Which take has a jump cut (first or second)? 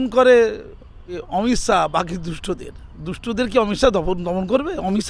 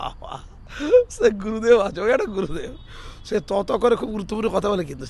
first